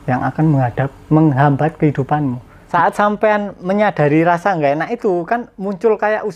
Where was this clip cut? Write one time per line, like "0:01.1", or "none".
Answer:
0:02.5